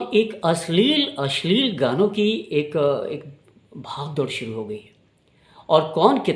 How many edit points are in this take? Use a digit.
0